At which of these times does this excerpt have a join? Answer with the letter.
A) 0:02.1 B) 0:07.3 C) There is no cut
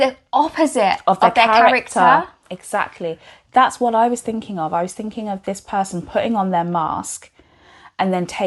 C